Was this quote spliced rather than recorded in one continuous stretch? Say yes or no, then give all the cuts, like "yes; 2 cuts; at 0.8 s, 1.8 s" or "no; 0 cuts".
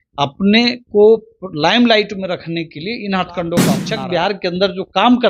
yes; 1 cut; at 3.8 s